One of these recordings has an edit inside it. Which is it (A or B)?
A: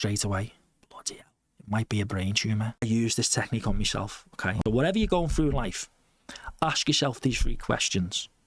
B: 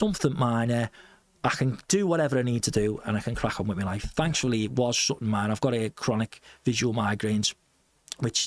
A